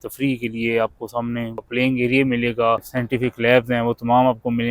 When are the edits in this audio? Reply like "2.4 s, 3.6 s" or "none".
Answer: 1.6 s, 2.9 s